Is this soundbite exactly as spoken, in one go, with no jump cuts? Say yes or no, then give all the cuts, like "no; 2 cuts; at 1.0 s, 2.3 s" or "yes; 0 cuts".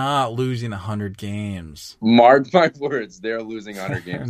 yes; 0 cuts